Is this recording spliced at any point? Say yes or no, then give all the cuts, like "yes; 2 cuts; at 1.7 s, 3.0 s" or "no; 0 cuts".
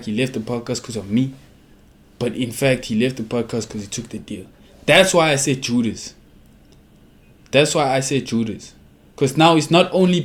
no; 0 cuts